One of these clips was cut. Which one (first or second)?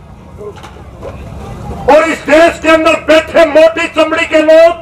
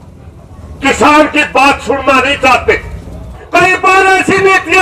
second